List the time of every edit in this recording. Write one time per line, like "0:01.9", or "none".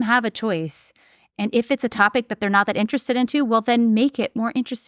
0:01.3